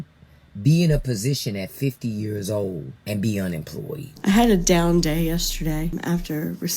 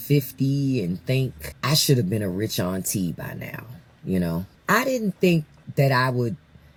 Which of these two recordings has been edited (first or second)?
first